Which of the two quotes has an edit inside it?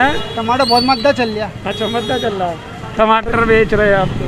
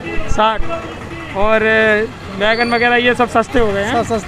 first; 1 cut; at 3.3 s

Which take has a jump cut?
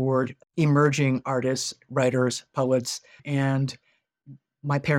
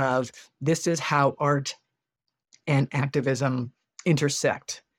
first; 1 cut; at 3.0 s

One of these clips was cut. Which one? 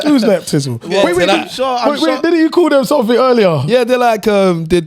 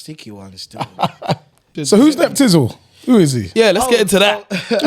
second; 1 cut; at 1.8 s

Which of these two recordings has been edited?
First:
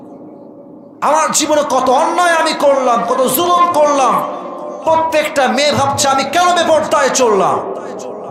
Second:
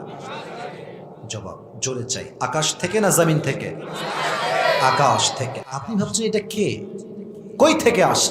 second; 1 cut; at 5.5 s

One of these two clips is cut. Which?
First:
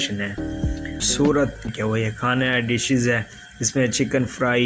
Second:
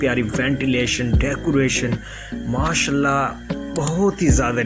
first; 1 cut; at 1.0 s

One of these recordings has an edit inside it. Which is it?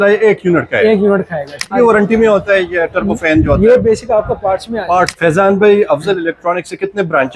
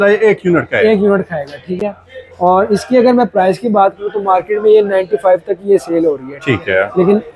first; 2 cuts; at 1.7 s, 5.1 s

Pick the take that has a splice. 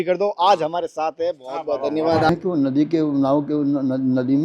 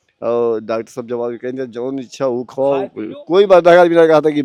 first; 1 cut; at 2.3 s

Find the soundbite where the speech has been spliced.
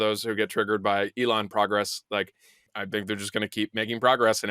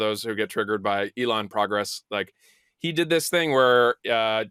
first; 1 cut; at 2.7 s

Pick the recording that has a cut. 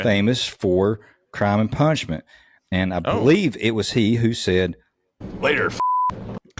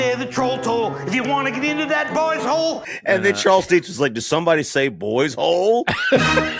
second; 1 cut; at 2.9 s

